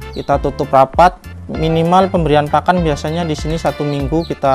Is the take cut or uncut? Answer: uncut